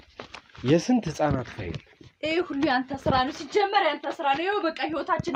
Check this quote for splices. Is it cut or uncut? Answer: uncut